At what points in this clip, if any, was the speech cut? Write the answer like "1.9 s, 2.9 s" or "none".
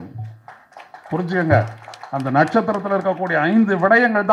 none